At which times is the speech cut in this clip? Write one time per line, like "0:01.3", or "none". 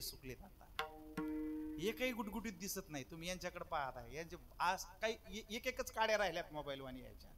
none